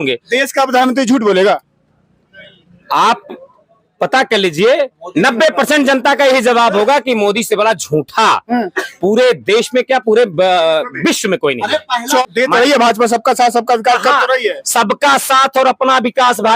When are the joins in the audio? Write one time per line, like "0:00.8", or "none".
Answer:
0:12.2